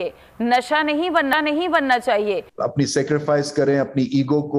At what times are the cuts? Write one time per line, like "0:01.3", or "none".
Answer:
0:02.5